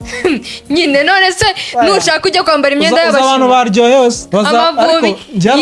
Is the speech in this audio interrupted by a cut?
yes; 1 cut; at 4.2 s

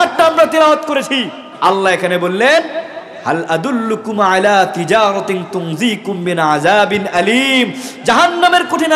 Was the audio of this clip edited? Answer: yes; 1 cut; at 1.5 s

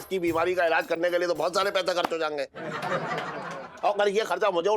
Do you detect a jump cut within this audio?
no; 0 cuts

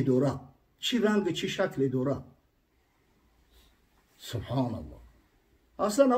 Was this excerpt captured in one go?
yes; 0 cuts

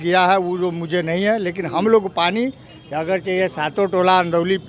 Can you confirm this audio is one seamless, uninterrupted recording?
yes; 0 cuts

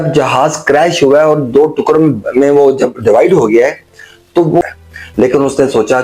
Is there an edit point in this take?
yes; 1 cut; at 4.6 s

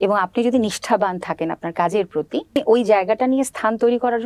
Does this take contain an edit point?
yes; 1 cut; at 2.6 s

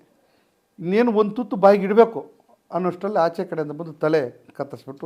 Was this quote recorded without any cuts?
yes; 0 cuts

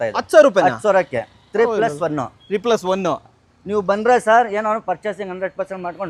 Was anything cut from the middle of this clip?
no; 0 cuts

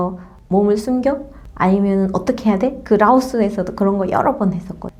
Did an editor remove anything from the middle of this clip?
no; 0 cuts

